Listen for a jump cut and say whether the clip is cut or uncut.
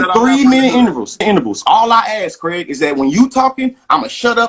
cut